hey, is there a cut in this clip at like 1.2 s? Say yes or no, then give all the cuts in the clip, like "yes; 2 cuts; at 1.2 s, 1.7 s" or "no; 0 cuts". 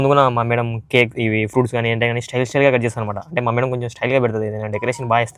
no; 0 cuts